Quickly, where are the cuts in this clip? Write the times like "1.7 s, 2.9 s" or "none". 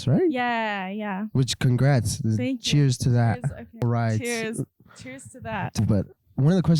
3.8 s, 5.8 s